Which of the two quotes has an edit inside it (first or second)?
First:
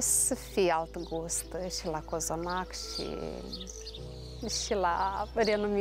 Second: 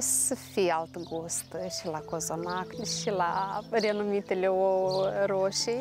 second